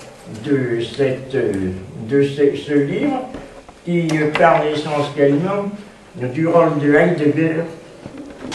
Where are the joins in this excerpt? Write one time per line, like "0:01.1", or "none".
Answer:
0:02.5